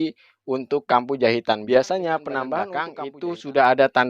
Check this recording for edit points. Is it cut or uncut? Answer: cut